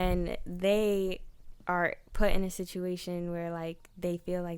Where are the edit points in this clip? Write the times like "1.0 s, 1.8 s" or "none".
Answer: none

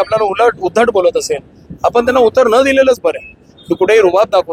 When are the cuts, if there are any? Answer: 3.5 s

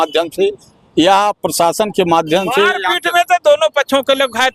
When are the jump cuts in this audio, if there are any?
none

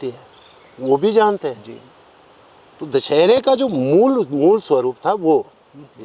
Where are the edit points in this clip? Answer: none

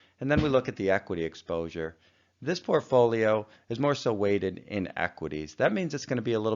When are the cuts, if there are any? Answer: 1.8 s

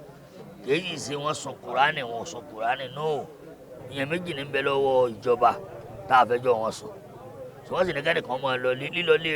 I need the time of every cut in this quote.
3.8 s

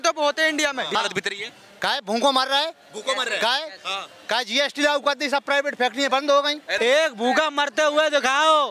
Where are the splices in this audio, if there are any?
1.0 s, 6.7 s

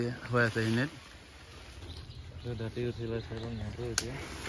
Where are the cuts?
2.0 s

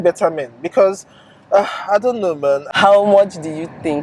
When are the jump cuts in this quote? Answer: 2.7 s

